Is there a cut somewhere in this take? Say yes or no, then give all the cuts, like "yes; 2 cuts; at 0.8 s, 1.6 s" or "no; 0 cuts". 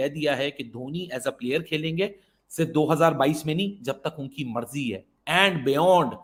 no; 0 cuts